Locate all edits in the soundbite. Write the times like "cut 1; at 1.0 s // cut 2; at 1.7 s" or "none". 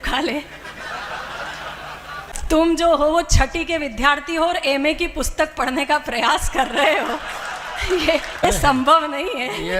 cut 1; at 2.4 s // cut 2; at 8.5 s